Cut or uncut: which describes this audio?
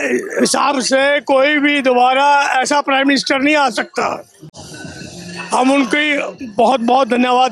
uncut